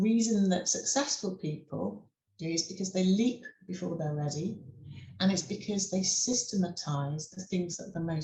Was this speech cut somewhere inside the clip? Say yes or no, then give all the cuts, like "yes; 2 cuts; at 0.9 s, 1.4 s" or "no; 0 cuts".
no; 0 cuts